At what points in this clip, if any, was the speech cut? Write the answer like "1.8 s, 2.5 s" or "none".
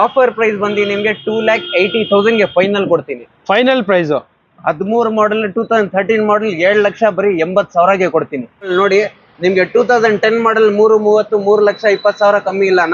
8.7 s